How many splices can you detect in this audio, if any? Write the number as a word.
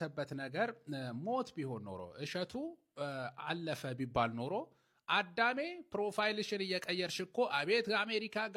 zero